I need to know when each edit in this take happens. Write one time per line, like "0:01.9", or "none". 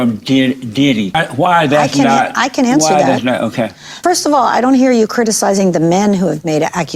0:01.2
0:04.0